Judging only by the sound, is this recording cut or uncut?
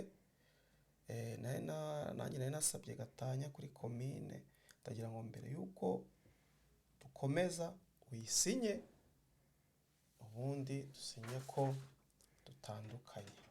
uncut